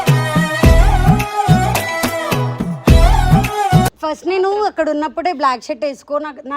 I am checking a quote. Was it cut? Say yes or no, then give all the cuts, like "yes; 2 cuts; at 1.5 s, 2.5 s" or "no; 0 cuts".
yes; 1 cut; at 4.0 s